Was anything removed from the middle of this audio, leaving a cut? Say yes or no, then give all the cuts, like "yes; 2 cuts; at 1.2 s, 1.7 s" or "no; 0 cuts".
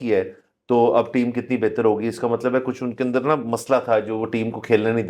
no; 0 cuts